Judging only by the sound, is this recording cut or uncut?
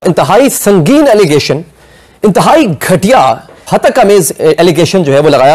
uncut